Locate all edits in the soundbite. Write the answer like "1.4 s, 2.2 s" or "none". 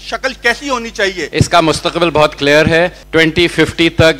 1.2 s, 3.0 s